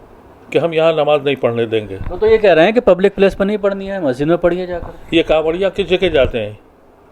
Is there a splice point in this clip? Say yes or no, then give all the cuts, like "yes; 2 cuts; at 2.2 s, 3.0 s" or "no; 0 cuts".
no; 0 cuts